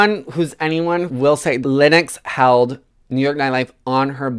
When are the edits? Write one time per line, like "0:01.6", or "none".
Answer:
0:01.1